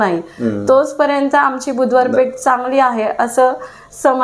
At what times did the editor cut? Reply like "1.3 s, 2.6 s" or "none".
none